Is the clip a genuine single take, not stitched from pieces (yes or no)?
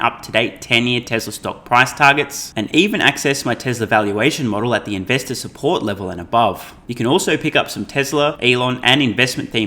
no